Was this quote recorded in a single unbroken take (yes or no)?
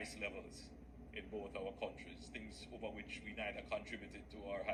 yes